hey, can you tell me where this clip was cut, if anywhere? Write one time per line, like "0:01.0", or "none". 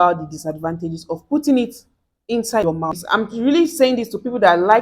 0:03.0